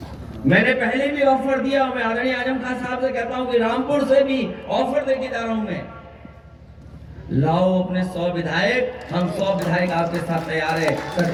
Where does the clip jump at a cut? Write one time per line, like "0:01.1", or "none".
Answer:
none